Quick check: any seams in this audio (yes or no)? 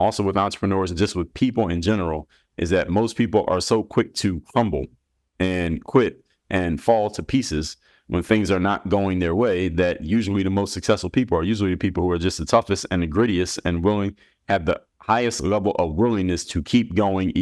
no